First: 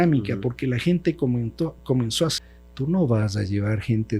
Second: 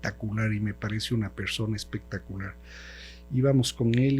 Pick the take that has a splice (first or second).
first